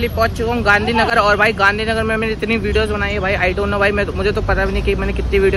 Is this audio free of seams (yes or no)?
yes